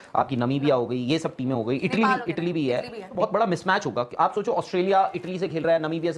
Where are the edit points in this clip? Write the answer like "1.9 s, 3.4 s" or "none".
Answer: 3.1 s